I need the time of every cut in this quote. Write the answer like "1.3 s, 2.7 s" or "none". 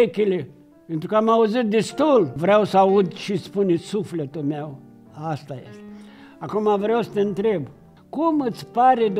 none